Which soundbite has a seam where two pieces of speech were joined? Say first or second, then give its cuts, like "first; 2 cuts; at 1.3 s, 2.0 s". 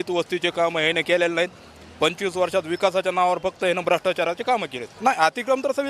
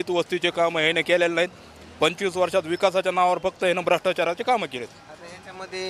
first; 1 cut; at 4.8 s